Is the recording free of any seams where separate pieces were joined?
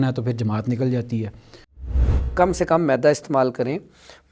no; 1 cut; at 2.1 s

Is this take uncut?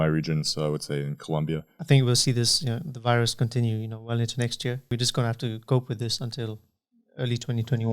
no; 2 cuts; at 1.7 s, 4.9 s

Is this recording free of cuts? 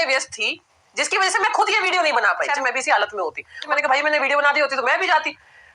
no; 2 cuts; at 2.5 s, 3.7 s

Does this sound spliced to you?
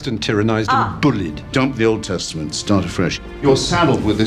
yes; 2 cuts; at 1.4 s, 3.3 s

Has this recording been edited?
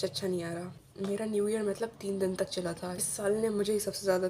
yes; 2 cuts; at 0.8 s, 3.1 s

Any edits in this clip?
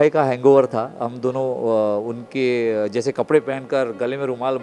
no; 0 cuts

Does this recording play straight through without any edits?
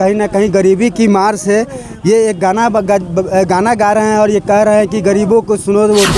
yes; 0 cuts

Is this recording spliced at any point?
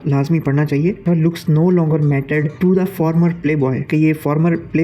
yes; 1 cut; at 1.0 s

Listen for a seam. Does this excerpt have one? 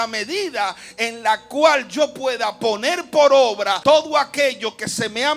yes; 1 cut; at 3.8 s

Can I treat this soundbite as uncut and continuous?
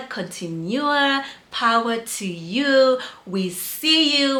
yes; 0 cuts

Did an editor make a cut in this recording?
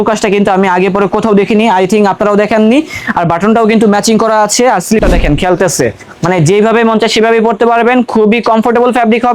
yes; 1 cut; at 5.0 s

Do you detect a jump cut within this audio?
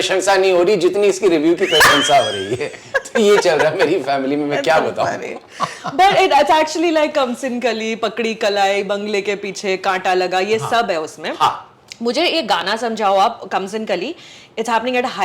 no; 0 cuts

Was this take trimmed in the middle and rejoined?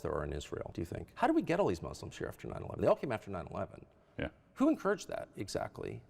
yes; 1 cut; at 1.0 s

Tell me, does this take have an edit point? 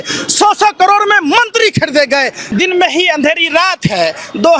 yes; 1 cut; at 2.4 s

